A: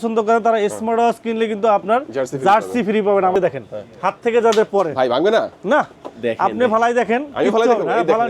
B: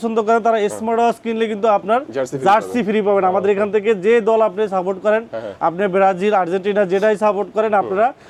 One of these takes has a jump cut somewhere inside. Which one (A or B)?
A